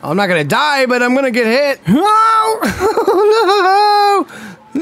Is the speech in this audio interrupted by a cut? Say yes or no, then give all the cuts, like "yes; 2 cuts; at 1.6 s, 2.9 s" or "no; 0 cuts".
yes; 1 cut; at 1.8 s